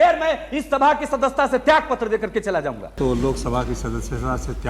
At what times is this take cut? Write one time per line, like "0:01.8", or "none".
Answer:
0:03.0

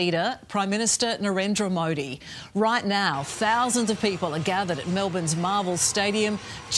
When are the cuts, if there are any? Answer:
none

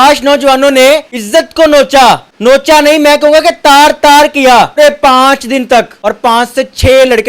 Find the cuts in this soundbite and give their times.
0:01.1
0:02.3
0:04.8
0:05.9

